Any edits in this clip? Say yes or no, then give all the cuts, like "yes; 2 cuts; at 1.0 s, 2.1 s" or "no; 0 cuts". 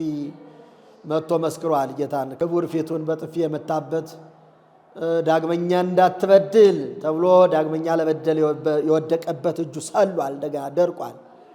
yes; 1 cut; at 2.3 s